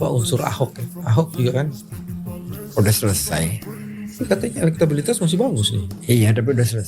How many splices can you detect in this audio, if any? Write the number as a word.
one